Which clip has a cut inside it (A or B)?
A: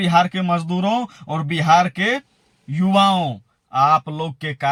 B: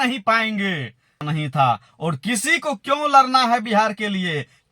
B